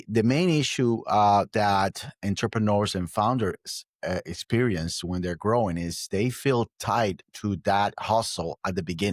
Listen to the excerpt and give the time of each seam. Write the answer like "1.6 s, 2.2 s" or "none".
none